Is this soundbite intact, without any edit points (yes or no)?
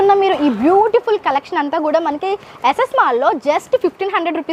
yes